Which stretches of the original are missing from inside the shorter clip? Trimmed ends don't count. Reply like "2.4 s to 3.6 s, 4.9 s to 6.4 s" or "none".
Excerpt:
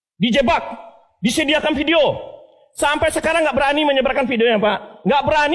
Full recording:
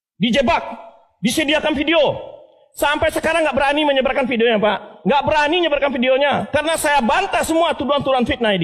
none